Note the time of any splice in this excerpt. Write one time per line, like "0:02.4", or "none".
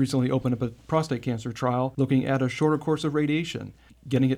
0:01.9